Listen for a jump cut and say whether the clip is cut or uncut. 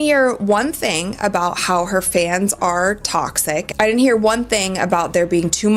uncut